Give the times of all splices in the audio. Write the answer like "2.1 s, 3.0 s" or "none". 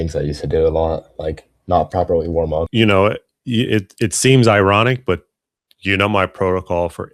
2.7 s